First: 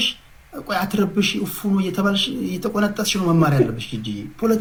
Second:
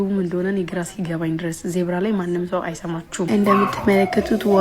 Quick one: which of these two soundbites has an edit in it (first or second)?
second